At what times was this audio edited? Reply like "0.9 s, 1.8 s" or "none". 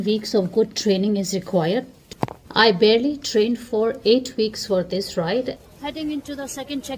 2.0 s, 5.6 s